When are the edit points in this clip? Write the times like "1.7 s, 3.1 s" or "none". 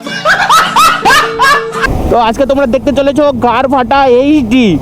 1.8 s

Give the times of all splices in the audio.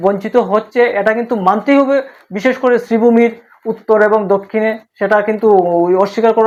none

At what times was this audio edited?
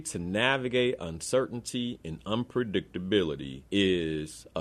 3.5 s

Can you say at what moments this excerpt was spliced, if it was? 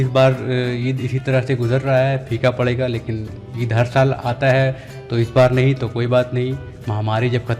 none

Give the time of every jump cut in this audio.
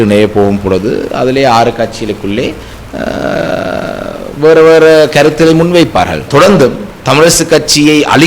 6.3 s

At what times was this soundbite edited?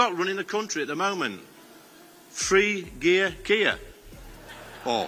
none

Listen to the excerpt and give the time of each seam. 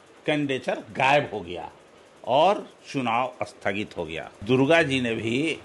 4.4 s

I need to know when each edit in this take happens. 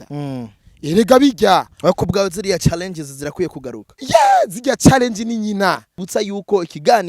6.0 s

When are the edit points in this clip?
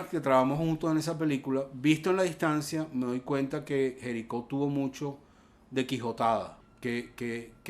6.6 s

